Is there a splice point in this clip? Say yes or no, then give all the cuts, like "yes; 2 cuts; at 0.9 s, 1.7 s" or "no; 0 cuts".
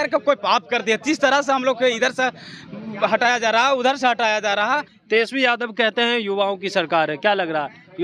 yes; 1 cut; at 4.9 s